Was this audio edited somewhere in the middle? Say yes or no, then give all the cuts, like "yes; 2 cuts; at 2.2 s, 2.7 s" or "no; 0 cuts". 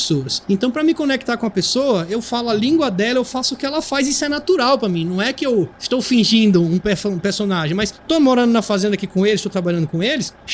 no; 0 cuts